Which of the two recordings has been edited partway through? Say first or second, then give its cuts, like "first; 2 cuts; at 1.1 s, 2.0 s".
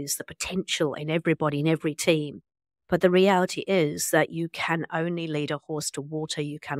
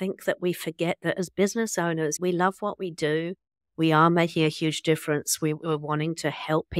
second; 1 cut; at 2.2 s